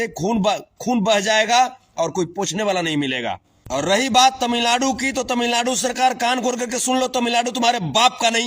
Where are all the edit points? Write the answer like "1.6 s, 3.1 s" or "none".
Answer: 3.5 s